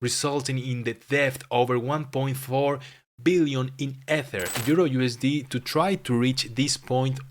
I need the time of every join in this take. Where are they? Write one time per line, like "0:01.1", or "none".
0:04.6